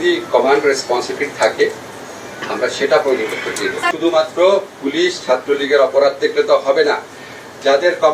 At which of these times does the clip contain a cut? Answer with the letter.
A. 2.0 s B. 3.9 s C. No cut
B